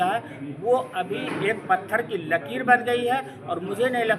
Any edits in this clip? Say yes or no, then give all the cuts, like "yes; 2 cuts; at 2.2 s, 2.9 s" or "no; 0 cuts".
no; 0 cuts